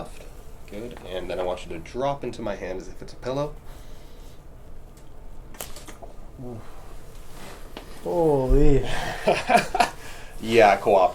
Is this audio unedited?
yes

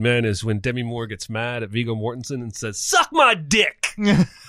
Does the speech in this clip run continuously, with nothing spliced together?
yes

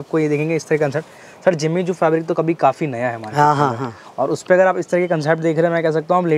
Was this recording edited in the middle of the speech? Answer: no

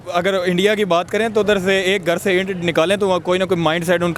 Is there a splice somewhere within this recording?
no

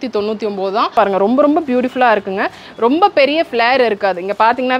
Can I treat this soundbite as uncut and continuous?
no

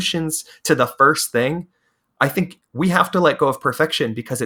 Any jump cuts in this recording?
no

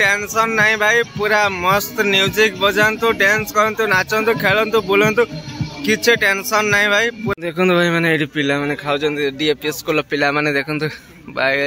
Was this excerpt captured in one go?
no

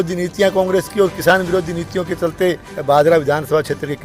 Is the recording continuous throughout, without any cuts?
no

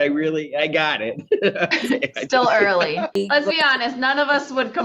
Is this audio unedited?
no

